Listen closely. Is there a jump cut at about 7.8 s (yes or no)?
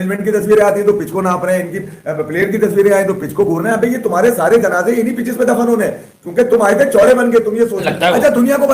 yes